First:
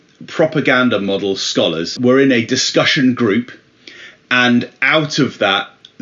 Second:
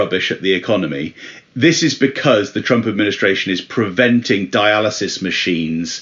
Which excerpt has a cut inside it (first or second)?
first